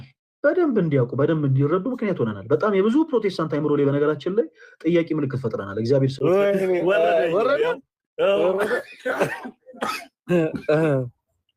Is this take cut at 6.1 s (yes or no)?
yes